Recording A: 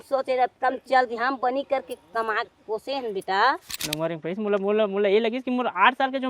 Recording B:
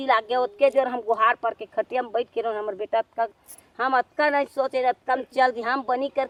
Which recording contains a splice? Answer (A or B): A